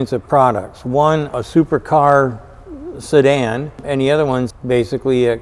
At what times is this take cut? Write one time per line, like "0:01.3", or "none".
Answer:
0:01.3
0:04.0